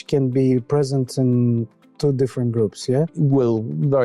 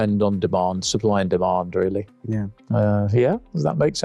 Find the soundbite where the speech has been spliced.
first; 1 cut; at 3.1 s

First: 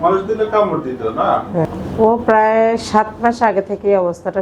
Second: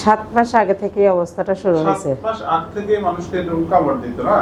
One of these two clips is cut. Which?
first; 1 cut; at 1.6 s

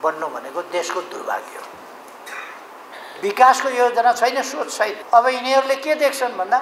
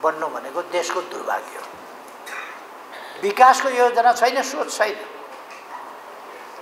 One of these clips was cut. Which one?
first; 1 cut; at 5.0 s

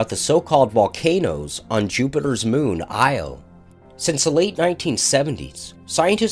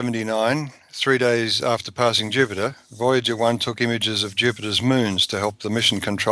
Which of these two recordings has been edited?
first; 1 cut; at 1.4 s

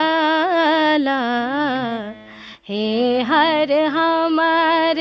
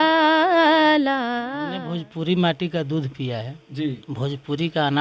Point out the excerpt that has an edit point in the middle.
second; 1 cut; at 1.5 s

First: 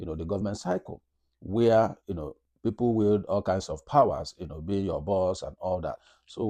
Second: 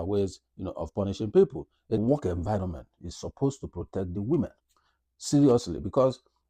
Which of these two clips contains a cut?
second; 1 cut; at 2.0 s

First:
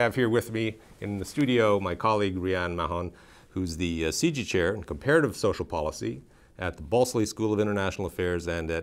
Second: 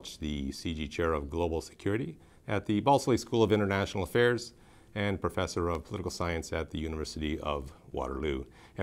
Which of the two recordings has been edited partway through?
first; 1 cut; at 1.8 s

